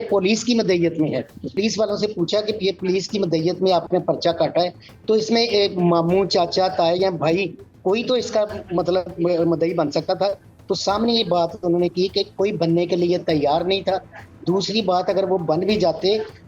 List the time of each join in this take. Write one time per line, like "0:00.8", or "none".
0:01.6